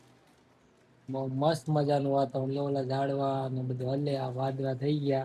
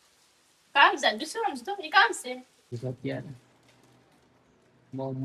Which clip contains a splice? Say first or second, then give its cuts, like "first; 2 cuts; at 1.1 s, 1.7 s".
second; 1 cut; at 2.8 s